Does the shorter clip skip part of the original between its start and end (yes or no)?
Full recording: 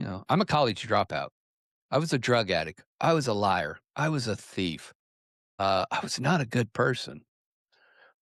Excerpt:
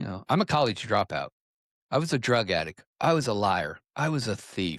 no